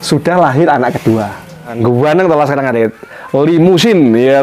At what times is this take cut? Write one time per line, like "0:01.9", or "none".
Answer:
0:01.7